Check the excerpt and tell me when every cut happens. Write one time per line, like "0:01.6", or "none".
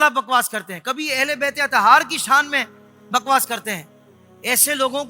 none